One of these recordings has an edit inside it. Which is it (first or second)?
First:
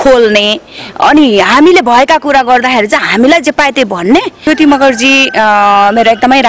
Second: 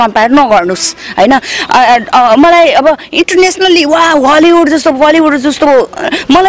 first